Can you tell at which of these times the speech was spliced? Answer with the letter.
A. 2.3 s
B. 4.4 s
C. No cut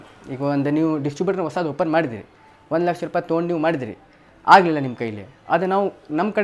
C